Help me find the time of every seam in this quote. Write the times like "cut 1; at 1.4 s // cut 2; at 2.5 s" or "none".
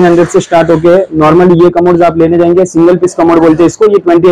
none